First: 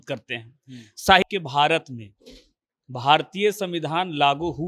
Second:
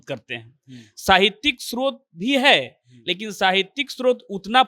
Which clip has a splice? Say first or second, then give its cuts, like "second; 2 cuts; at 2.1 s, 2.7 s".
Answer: first; 1 cut; at 1.2 s